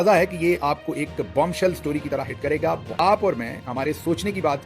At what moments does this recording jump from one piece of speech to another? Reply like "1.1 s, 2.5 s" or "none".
3.0 s